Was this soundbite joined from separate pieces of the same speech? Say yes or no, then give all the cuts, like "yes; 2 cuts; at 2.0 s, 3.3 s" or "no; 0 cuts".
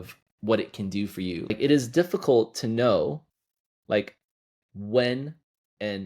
yes; 1 cut; at 1.5 s